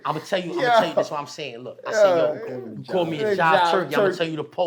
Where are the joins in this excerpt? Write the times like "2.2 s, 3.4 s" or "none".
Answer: none